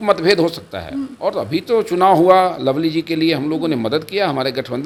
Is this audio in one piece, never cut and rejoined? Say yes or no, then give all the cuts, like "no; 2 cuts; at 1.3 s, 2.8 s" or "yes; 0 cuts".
yes; 0 cuts